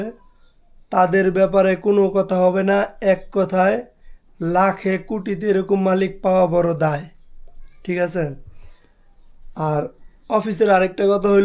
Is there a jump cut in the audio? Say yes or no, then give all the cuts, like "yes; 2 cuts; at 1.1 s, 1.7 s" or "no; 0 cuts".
no; 0 cuts